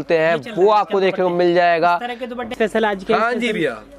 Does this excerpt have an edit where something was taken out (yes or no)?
yes